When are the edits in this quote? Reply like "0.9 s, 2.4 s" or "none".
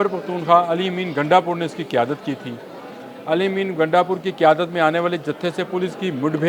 none